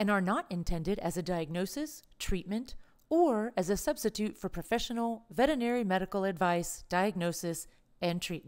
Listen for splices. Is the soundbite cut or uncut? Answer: uncut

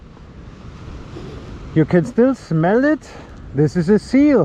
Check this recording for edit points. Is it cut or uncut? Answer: uncut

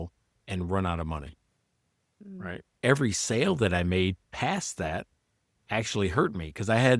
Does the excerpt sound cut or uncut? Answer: cut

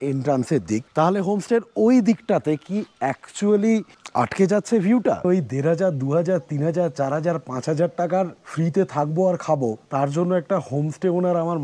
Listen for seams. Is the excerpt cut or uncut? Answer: cut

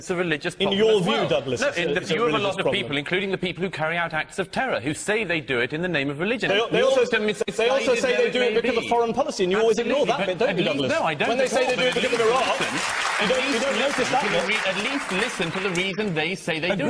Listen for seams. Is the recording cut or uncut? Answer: uncut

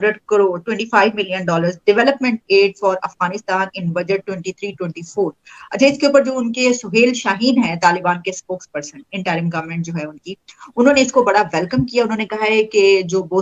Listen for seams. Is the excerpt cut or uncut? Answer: uncut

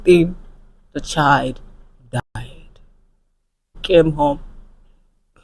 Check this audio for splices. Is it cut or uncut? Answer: cut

